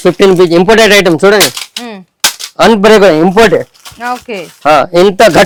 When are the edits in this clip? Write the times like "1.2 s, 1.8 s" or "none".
none